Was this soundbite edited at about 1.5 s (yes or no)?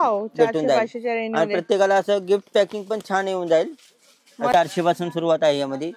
no